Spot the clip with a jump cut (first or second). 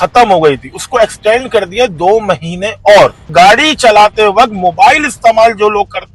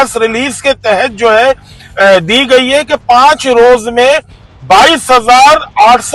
first